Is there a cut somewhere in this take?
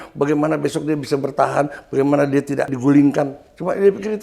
yes; 1 cut; at 2.7 s

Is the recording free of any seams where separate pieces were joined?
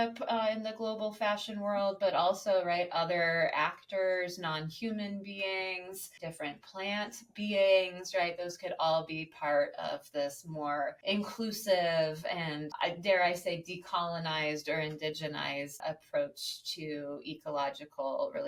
yes; 0 cuts

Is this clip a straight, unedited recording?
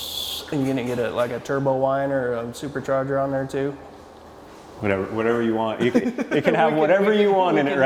yes; 0 cuts

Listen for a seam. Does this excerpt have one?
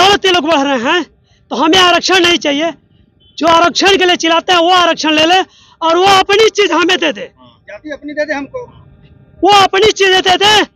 no; 0 cuts

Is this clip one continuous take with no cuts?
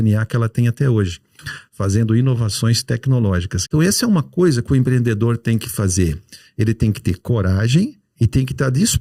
no; 1 cut; at 3.5 s

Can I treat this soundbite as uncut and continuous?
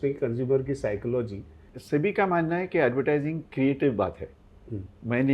no; 1 cut; at 1.7 s

